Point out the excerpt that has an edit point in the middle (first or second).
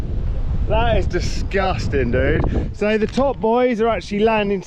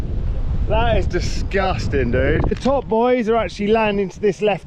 second